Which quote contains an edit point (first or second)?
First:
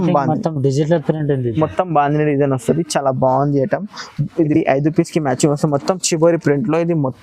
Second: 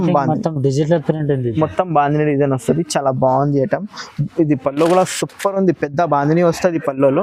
first